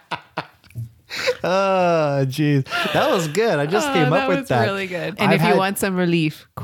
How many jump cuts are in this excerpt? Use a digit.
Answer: 1